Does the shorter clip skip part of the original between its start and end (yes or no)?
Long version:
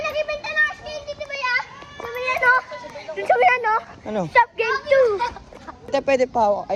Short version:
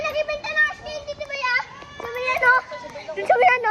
no